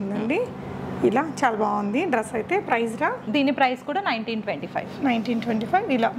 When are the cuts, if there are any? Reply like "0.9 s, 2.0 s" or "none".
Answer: none